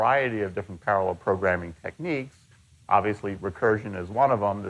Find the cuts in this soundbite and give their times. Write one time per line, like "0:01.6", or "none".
0:01.7

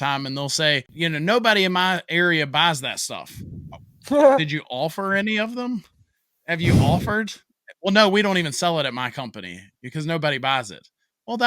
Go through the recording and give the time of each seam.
0:00.9

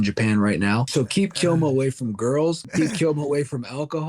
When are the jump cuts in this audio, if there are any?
0:00.9
0:02.6

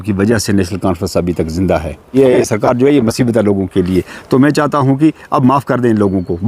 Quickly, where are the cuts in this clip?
0:02.2

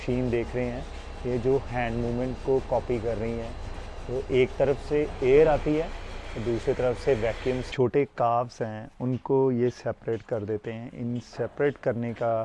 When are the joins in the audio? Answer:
0:07.6

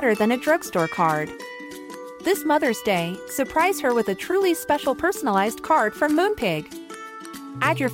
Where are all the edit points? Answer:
none

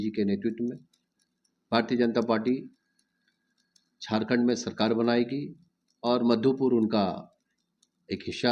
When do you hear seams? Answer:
none

